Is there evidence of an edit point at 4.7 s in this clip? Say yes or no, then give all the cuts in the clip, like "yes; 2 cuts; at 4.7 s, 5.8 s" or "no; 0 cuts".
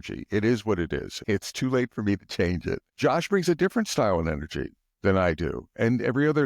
no; 2 cuts; at 1.1 s, 2.9 s